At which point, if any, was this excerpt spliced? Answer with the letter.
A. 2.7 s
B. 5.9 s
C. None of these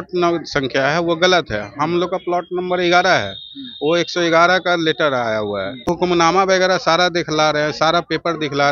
B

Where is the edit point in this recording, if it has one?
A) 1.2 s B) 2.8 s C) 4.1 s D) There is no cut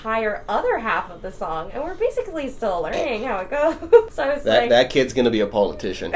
C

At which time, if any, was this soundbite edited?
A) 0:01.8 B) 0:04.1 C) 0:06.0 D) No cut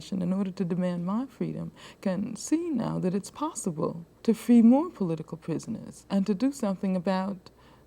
B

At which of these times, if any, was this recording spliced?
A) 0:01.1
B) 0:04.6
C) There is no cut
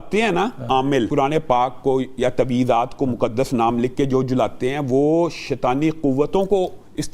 A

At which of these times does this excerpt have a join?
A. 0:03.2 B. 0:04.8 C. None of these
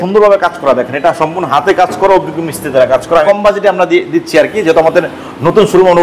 A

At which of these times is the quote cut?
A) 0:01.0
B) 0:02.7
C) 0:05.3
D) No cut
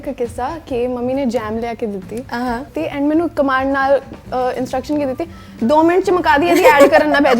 B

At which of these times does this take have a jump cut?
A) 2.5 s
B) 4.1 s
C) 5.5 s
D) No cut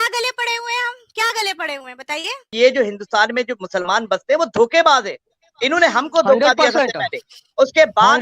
A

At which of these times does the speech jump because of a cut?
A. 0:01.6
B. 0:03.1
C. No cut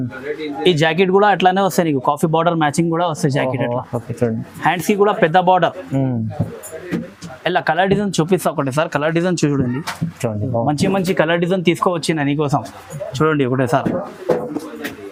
C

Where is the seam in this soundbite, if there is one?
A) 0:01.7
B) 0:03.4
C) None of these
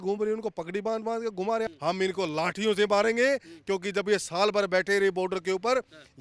A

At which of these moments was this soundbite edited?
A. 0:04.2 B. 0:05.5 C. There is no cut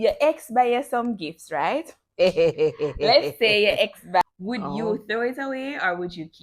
A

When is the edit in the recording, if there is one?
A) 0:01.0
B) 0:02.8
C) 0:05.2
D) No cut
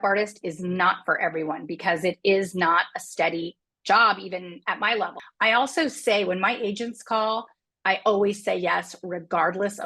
C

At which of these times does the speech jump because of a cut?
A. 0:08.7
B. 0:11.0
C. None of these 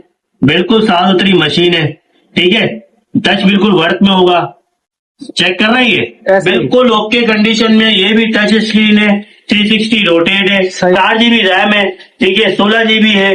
B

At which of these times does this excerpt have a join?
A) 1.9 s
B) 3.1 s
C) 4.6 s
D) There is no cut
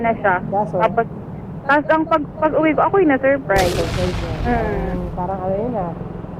D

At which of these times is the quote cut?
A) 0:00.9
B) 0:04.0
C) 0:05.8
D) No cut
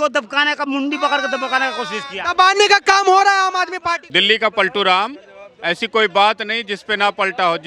B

